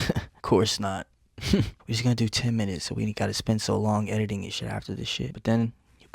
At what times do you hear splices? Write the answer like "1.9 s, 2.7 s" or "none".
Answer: 1.8 s

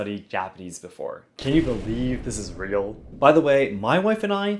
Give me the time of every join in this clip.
1.3 s

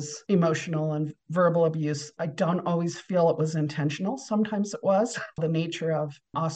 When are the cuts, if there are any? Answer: 5.4 s

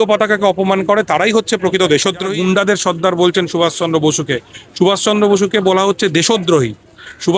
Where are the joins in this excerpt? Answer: 2.3 s

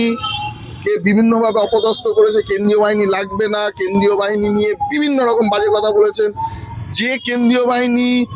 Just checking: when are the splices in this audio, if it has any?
none

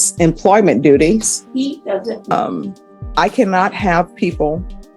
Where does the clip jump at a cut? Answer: 2.3 s

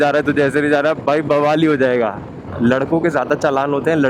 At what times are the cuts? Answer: 2.4 s

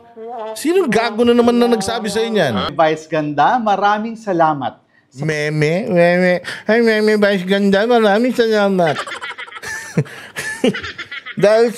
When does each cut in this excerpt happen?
2.7 s

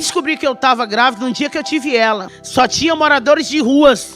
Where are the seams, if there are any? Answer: 2.3 s

